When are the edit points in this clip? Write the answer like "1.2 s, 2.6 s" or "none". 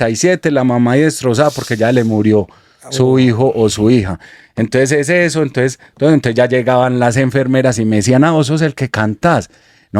none